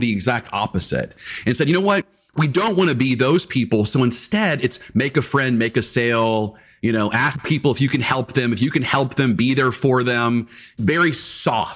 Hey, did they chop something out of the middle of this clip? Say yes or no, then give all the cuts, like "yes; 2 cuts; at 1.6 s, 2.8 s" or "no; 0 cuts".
yes; 1 cut; at 10.7 s